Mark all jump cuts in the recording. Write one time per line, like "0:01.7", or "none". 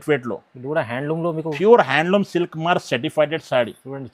none